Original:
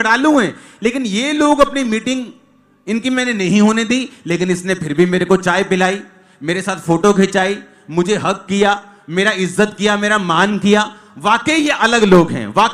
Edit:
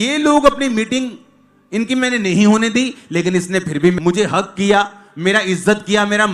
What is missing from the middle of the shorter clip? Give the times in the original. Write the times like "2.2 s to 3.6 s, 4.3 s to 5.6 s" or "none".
5.1 s to 7.9 s